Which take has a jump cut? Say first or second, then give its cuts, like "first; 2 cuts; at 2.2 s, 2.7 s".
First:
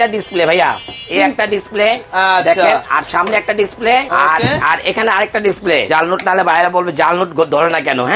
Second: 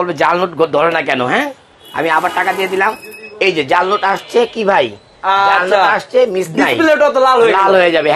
first; 2 cuts; at 4.1 s, 5.9 s